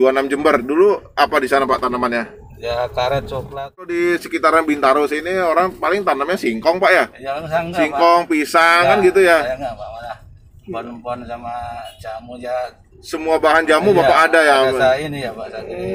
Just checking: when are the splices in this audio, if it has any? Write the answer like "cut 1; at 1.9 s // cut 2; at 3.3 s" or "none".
cut 1; at 3.9 s